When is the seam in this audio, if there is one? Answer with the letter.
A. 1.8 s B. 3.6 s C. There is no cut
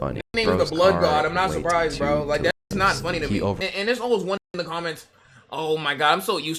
B